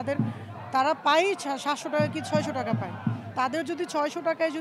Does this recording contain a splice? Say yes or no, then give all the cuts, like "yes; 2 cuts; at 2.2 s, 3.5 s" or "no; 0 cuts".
no; 0 cuts